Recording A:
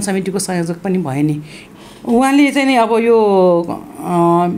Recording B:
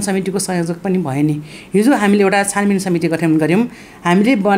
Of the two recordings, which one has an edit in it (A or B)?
A